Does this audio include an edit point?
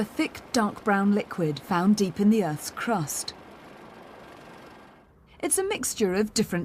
no; 0 cuts

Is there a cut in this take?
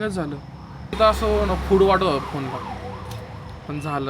yes; 1 cut; at 1.0 s

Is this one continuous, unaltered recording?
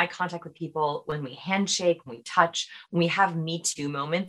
yes; 0 cuts

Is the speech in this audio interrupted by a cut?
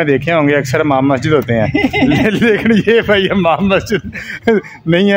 no; 0 cuts

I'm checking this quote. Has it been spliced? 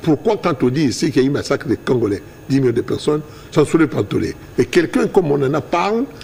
no; 0 cuts

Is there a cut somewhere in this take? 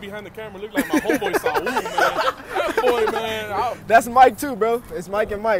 no; 0 cuts

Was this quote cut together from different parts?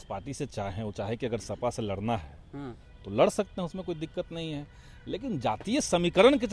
no; 0 cuts

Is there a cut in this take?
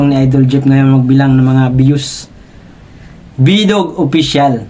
no; 0 cuts

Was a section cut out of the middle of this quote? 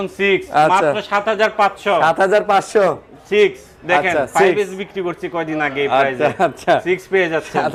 no; 0 cuts

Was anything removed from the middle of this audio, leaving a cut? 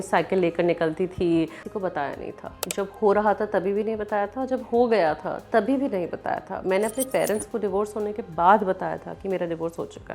yes; 1 cut; at 1.6 s

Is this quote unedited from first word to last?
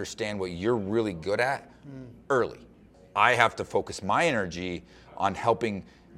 no; 1 cut; at 2.9 s

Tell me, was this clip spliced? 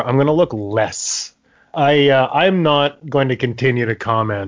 no; 0 cuts

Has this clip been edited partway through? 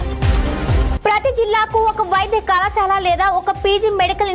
yes; 1 cut; at 1.0 s

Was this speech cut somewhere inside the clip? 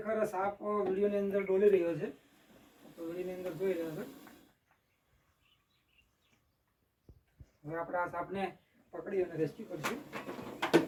no; 0 cuts

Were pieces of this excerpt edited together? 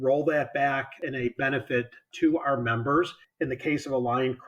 yes; 3 cuts; at 1.0 s, 2.1 s, 3.2 s

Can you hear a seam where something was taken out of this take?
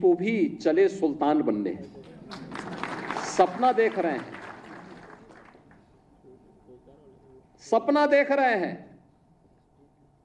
no; 0 cuts

